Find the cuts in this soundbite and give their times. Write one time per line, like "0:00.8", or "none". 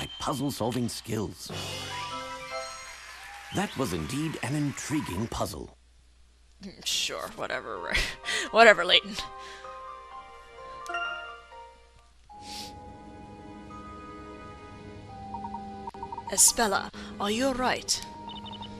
0:08.2